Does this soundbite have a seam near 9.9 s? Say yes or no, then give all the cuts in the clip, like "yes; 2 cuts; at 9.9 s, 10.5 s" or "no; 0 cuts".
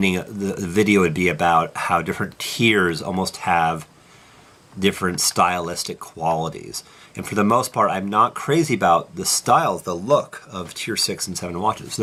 no; 0 cuts